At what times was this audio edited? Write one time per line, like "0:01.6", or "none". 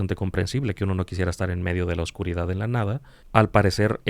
0:03.1